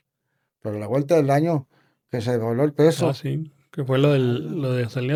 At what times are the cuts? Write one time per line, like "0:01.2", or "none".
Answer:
none